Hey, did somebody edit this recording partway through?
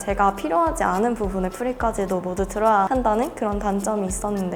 no; 0 cuts

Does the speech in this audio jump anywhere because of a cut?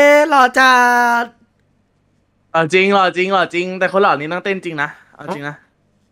no; 0 cuts

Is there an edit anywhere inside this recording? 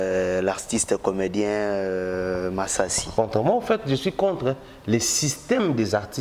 yes; 1 cut; at 3.0 s

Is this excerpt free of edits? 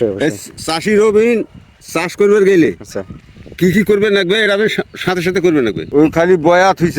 no; 1 cut; at 5.9 s

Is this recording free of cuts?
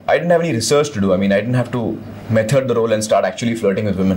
yes; 0 cuts

